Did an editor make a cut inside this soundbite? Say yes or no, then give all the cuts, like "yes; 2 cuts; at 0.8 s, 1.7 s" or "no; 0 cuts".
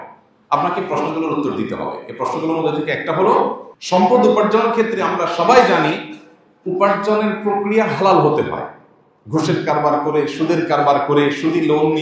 yes; 1 cut; at 3.7 s